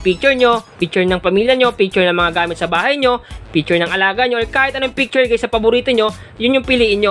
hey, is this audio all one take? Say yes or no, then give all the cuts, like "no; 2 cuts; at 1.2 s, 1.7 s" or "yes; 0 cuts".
yes; 0 cuts